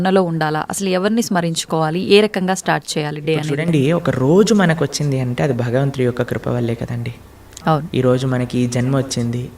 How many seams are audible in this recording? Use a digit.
0